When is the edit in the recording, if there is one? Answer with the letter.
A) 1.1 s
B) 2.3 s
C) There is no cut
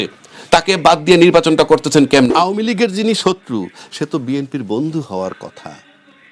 B